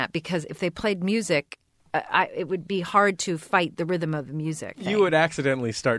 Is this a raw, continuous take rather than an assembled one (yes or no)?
no